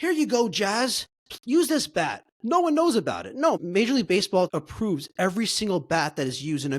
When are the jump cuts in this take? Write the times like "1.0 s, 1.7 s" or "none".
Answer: 3.6 s, 4.5 s